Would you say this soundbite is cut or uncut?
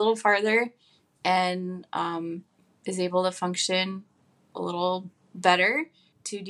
uncut